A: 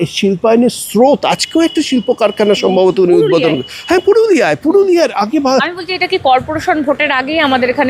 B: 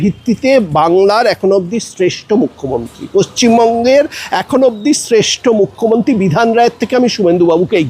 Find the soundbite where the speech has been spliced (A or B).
A